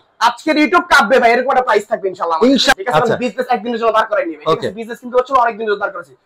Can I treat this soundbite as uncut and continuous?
no; 1 cut; at 2.7 s

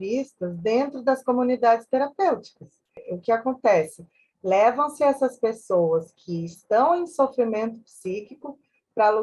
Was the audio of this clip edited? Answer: yes; 1 cut; at 3.1 s

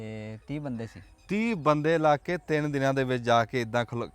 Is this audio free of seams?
yes; 0 cuts

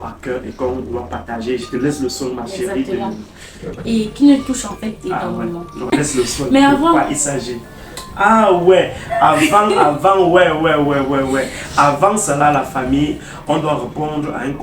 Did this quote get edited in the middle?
yes; 1 cut; at 5.9 s

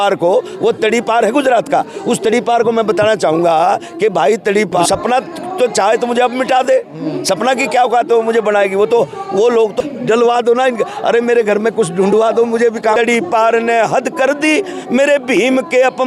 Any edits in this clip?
yes; 3 cuts; at 4.8 s, 9.8 s, 13.0 s

